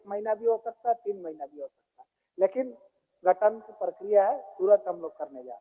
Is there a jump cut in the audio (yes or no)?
no